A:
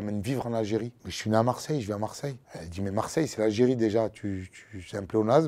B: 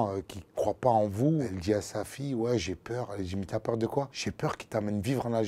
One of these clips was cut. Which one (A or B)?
B